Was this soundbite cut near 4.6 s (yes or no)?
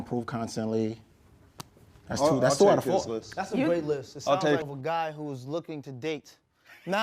yes